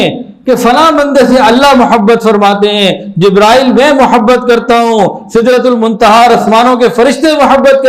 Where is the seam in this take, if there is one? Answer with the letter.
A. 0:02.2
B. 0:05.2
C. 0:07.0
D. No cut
D